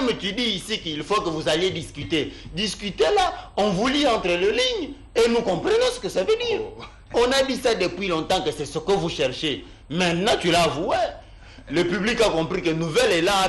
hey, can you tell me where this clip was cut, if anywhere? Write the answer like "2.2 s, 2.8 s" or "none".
none